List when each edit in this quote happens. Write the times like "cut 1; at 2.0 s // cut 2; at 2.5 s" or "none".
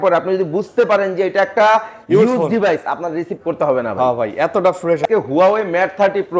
cut 1; at 5.0 s